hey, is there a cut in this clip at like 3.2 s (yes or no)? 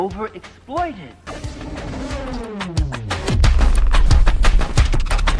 no